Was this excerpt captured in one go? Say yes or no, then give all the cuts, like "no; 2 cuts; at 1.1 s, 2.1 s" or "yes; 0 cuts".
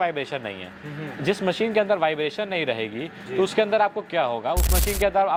yes; 0 cuts